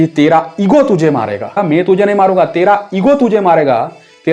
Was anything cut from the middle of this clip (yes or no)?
no